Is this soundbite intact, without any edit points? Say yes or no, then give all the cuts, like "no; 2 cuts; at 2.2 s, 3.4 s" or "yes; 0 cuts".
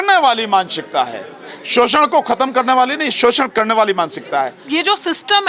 no; 1 cut; at 4.6 s